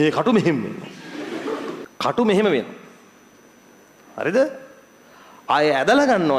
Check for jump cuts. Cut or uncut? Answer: cut